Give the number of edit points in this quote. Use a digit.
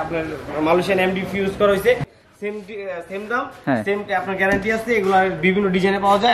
1